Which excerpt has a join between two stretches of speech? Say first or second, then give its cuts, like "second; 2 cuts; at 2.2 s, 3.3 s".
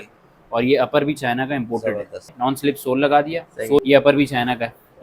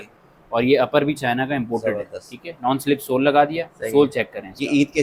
first; 2 cuts; at 2.2 s, 3.8 s